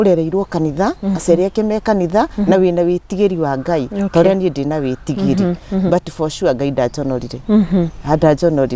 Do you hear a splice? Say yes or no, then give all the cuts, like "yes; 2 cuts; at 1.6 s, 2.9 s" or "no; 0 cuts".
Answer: no; 0 cuts